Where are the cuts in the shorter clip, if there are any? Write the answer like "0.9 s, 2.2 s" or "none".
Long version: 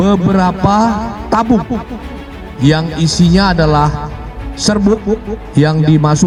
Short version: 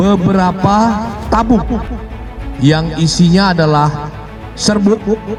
none